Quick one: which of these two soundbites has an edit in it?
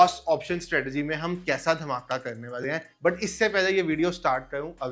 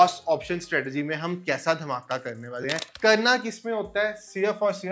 second; 1 cut; at 2.9 s

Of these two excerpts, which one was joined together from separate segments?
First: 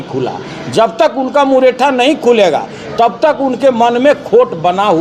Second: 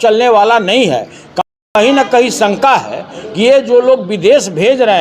second; 1 cut; at 1.3 s

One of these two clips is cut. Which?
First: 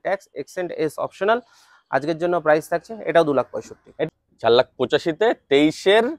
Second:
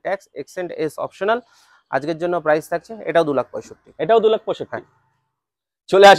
first; 1 cut; at 4.1 s

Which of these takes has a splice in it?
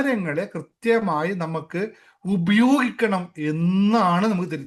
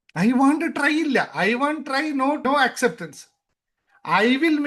second; 1 cut; at 2.4 s

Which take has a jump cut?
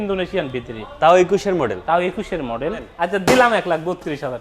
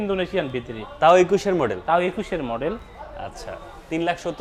first; 1 cut; at 2.9 s

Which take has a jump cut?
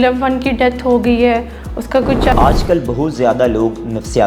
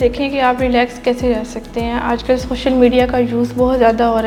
first; 1 cut; at 2.3 s

